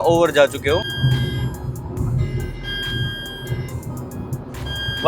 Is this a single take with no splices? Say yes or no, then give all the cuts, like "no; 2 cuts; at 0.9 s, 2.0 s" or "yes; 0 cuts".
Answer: no; 1 cut; at 1.0 s